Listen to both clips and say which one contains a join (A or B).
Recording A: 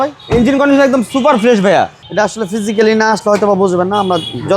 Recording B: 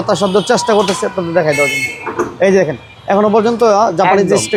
A